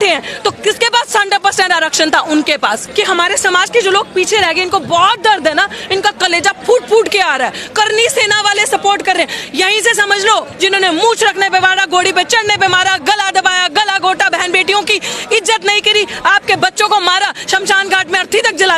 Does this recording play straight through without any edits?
no; 2 cuts; at 2.8 s, 10.5 s

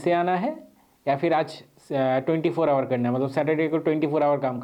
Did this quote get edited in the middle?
no; 0 cuts

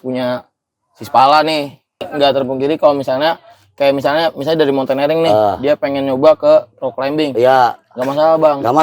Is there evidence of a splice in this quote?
yes; 1 cut; at 2.1 s

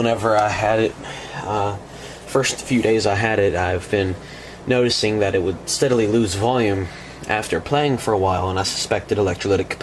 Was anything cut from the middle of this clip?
yes; 1 cut; at 8.4 s

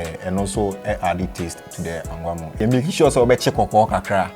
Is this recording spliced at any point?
yes; 1 cut; at 2.6 s

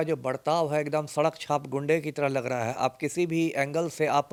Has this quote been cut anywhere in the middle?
no; 0 cuts

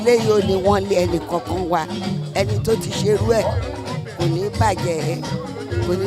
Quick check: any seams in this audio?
no; 0 cuts

